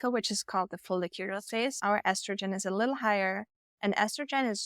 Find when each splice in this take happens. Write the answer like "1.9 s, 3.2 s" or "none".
1.8 s